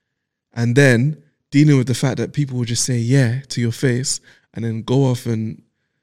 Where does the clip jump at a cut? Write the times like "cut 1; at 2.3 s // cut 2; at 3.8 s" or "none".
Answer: none